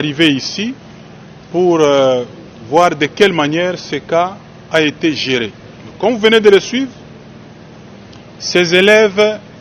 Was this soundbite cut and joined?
no; 0 cuts

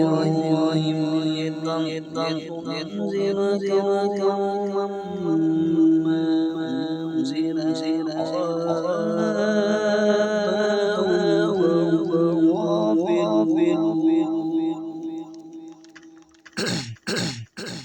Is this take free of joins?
no; 1 cut; at 16.9 s

